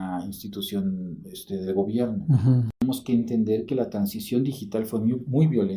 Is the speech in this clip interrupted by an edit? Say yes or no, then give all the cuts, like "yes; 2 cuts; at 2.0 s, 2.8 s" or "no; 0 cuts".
yes; 1 cut; at 2.8 s